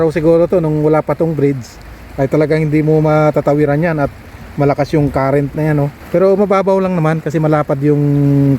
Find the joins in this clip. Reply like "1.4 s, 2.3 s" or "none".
6.0 s